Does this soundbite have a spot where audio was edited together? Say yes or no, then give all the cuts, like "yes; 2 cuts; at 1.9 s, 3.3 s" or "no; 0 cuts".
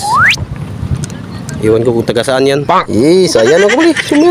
yes; 1 cut; at 2.7 s